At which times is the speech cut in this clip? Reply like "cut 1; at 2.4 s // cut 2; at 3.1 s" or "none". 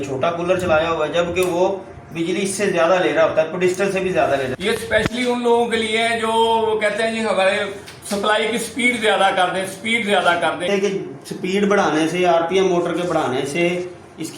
cut 1; at 4.6 s // cut 2; at 10.7 s